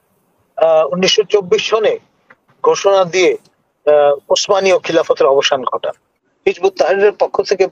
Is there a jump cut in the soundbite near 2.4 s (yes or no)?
no